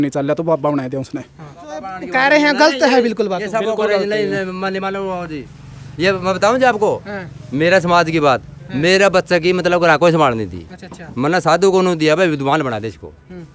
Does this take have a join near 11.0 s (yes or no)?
no